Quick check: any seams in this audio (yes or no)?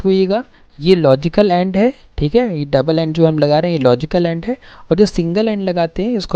no